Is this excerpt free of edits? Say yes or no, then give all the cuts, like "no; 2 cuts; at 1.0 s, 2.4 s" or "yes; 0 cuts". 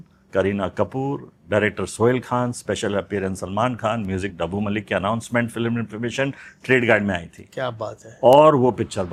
yes; 0 cuts